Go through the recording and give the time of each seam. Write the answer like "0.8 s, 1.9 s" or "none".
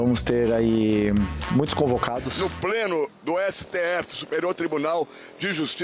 2.3 s

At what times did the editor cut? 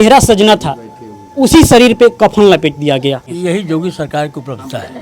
3.3 s

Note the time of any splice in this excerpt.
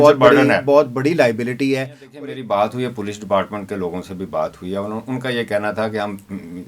2.1 s

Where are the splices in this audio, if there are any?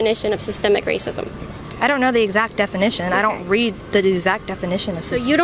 none

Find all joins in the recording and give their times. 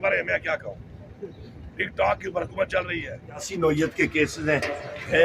3.5 s

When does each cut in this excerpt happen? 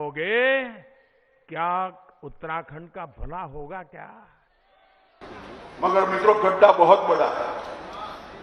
5.2 s

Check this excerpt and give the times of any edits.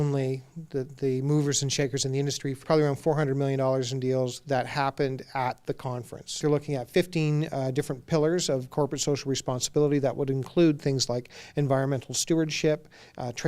2.6 s, 6.4 s

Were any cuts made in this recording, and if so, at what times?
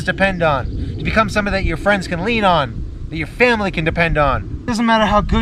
4.5 s

